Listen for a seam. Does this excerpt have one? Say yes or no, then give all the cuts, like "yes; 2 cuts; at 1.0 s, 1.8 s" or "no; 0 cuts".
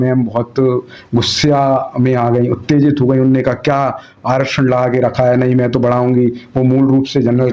no; 0 cuts